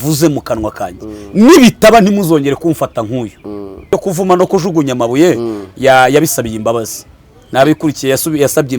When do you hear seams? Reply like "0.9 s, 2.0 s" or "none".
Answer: 3.8 s